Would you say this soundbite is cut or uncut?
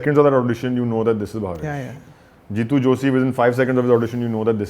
uncut